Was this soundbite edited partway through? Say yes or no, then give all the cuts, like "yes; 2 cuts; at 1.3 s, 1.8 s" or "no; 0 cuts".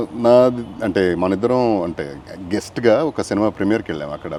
no; 0 cuts